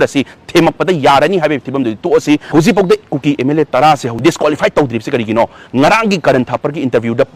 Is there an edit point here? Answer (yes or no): no